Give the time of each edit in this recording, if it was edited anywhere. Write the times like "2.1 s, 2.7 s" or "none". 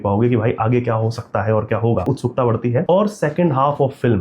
2.4 s

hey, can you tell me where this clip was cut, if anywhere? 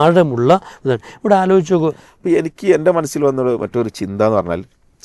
2.1 s

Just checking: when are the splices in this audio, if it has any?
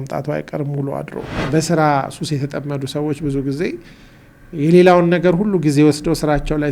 1.3 s

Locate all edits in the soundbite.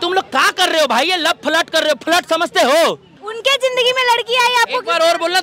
3.2 s

